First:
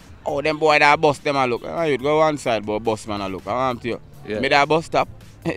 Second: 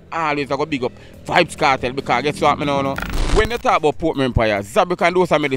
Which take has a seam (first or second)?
second